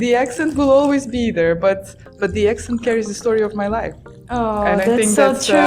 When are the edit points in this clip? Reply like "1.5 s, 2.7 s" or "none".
2.0 s